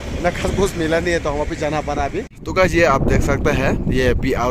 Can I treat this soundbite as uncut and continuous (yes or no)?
no